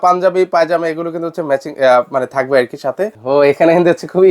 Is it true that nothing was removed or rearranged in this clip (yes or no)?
no